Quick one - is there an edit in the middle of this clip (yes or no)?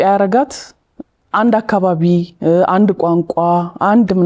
no